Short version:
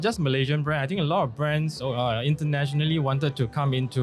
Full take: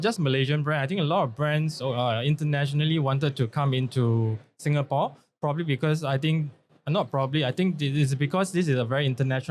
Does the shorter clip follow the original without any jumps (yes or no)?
yes